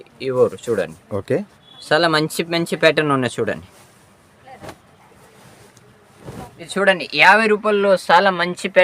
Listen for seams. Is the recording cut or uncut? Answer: cut